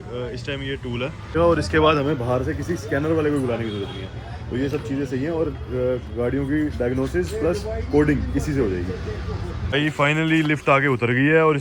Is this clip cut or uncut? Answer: cut